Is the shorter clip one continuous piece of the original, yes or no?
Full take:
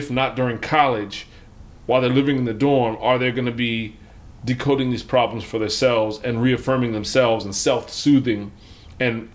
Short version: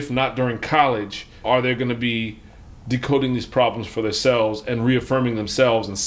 no